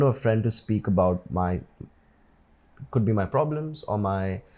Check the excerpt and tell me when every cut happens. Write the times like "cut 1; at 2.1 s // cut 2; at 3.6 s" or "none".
none